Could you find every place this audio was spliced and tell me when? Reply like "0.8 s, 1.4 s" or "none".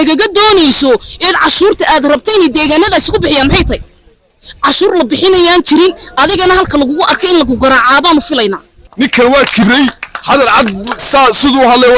8.8 s